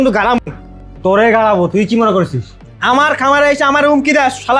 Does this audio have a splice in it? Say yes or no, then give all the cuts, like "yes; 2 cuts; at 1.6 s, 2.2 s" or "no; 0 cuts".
no; 0 cuts